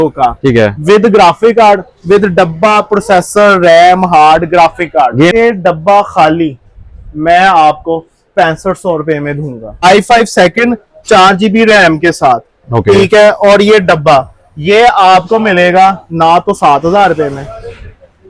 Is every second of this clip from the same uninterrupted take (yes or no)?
no